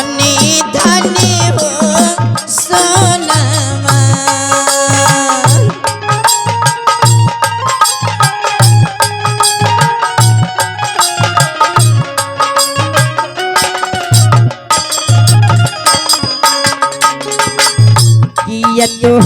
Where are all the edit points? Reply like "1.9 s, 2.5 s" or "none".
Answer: none